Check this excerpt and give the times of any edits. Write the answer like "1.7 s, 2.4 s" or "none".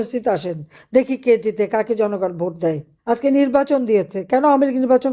2.9 s